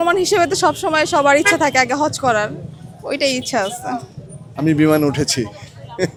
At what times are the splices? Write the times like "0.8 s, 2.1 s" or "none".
none